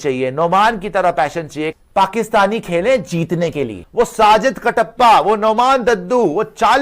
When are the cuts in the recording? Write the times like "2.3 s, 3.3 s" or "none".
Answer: 1.7 s, 3.8 s